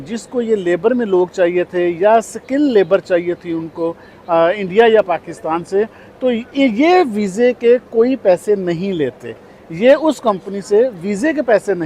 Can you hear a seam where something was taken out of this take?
no; 0 cuts

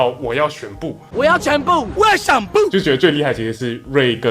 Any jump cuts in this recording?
yes; 2 cuts; at 1.1 s, 2.7 s

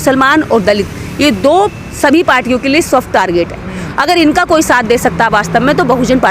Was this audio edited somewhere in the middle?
no; 0 cuts

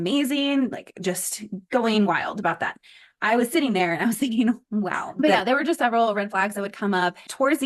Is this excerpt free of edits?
no; 1 cut; at 5.0 s

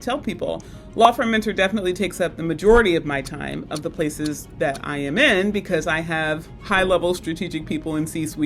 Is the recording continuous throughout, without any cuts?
yes; 0 cuts

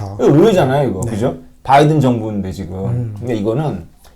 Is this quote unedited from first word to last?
yes; 0 cuts

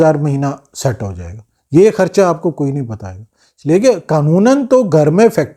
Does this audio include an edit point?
no; 0 cuts

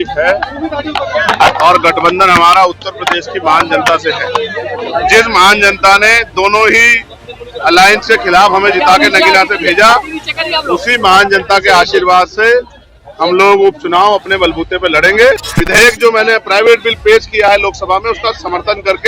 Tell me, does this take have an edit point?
yes; 1 cut; at 15.5 s

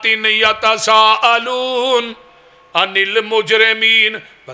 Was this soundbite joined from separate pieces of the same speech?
no; 0 cuts

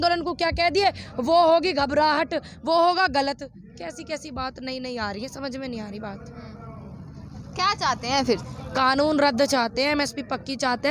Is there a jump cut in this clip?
no; 0 cuts

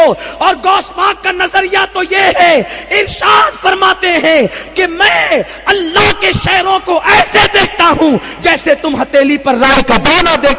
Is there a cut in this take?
no; 0 cuts

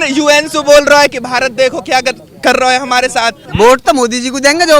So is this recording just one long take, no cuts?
no; 1 cut; at 3.4 s

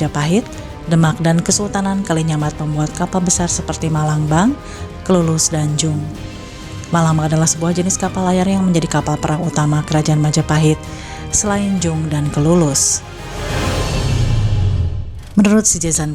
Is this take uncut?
yes; 0 cuts

